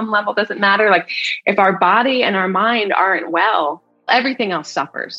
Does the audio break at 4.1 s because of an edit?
yes; 1 cut; at 4.1 s

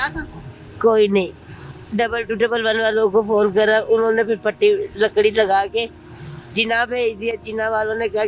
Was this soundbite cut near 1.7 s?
no; 0 cuts

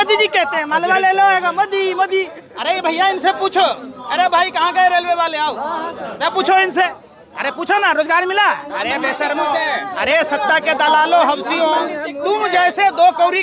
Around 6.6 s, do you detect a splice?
no; 0 cuts

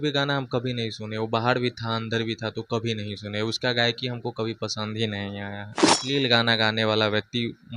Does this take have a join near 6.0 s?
yes; 1 cut; at 6.0 s

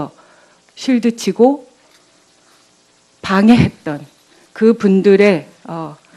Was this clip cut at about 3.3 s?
yes; 1 cut; at 3.3 s

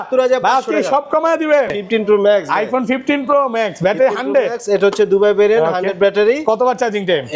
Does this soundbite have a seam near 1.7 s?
yes; 1 cut; at 1.7 s

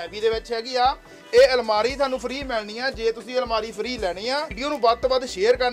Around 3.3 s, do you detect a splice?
no; 1 cut; at 4.5 s

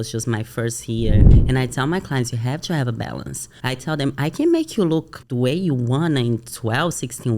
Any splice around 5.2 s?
yes; 3 cuts; at 1.4 s, 3.5 s, 5.2 s

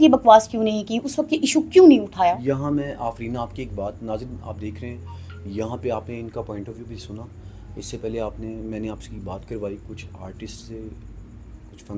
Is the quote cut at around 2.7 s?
no; 0 cuts

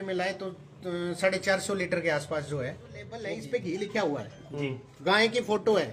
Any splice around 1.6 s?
no; 1 cut; at 3.2 s

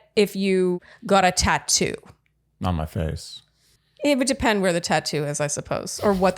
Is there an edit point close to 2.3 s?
no; 1 cut; at 0.9 s

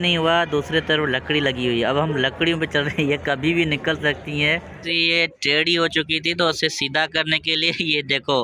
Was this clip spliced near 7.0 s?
no; 1 cut; at 4.7 s

